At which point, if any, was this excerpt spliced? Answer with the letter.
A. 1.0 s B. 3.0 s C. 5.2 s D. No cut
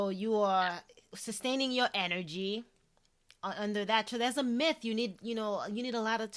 D